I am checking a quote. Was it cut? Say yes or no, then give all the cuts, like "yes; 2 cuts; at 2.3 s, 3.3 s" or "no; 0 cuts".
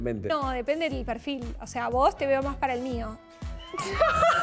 no; 0 cuts